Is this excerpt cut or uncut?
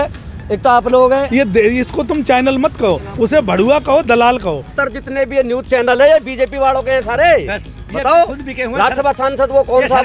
cut